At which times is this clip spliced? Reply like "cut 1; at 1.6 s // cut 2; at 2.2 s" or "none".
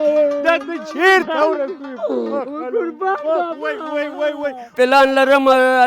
cut 1; at 4.7 s